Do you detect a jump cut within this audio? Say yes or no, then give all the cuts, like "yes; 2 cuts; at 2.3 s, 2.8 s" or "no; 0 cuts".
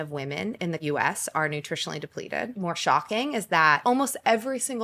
yes; 3 cuts; at 0.8 s, 2.5 s, 3.8 s